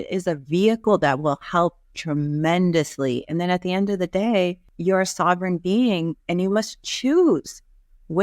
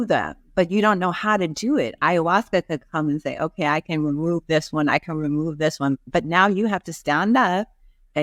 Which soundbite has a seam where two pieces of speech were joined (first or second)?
first